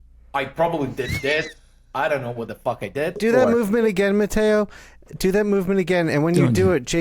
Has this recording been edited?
yes; 1 cut; at 3.2 s

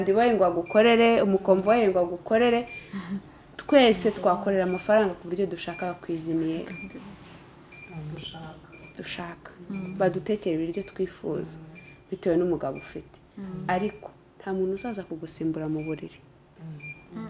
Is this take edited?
no; 0 cuts

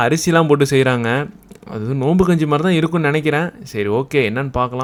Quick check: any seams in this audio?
no; 0 cuts

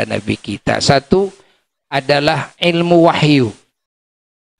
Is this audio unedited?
yes; 0 cuts

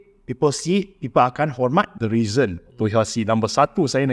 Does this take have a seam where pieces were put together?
yes; 1 cut; at 1.9 s

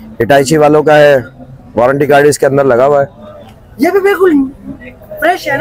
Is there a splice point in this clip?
no; 0 cuts

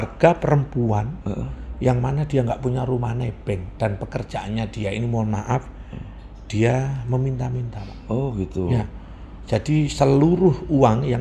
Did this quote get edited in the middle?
no; 0 cuts

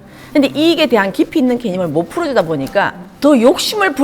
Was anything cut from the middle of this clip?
yes; 2 cuts; at 1.1 s, 3.0 s

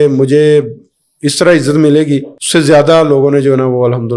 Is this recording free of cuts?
no; 1 cut; at 2.4 s

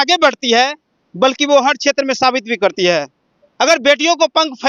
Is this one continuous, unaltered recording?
yes; 0 cuts

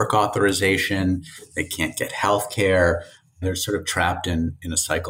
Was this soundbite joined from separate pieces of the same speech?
no; 0 cuts

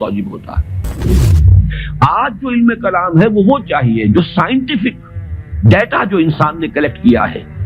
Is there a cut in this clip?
yes; 1 cut; at 1.2 s

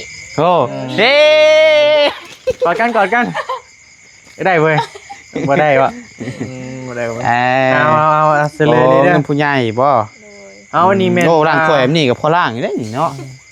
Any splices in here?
no; 0 cuts

